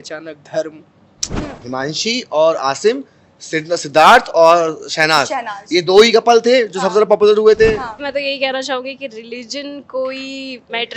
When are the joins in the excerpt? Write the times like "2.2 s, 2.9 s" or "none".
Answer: 1.6 s, 8.0 s